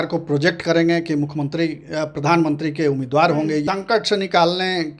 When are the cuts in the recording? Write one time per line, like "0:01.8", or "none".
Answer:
0:03.6

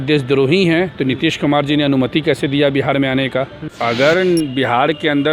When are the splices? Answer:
0:03.6

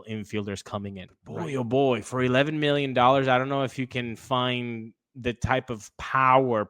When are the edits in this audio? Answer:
0:01.1

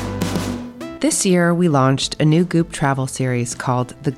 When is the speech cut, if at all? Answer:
0:00.9

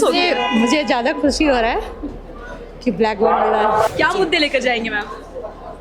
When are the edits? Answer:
0:03.9

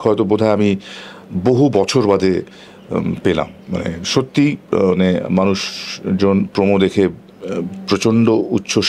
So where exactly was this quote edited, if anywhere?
none

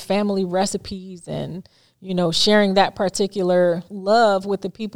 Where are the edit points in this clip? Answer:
none

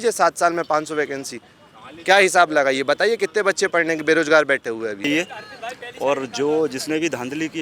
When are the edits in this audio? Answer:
0:05.0

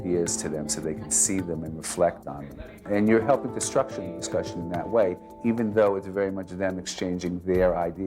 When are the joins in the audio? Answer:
0:02.9

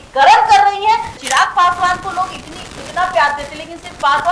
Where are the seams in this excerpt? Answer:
0:01.1

